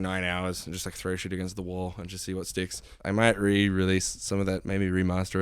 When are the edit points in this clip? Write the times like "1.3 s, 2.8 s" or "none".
2.9 s